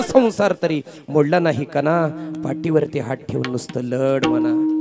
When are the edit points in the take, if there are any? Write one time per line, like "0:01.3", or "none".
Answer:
none